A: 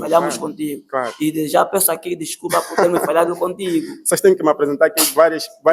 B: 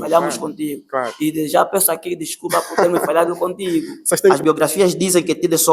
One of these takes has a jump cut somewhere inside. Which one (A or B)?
B